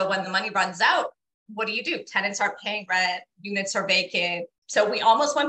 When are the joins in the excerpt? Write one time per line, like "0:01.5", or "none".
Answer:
0:04.6